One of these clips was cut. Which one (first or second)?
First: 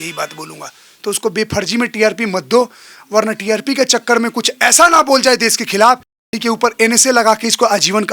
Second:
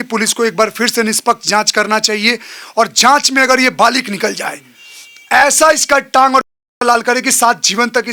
first